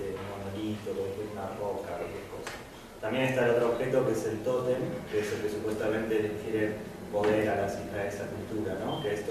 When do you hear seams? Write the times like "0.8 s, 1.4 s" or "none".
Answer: none